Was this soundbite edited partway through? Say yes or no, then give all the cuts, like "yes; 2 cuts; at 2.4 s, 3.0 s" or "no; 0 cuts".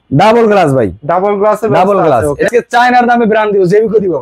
yes; 1 cut; at 2.5 s